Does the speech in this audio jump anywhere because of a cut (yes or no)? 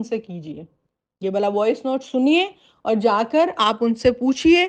no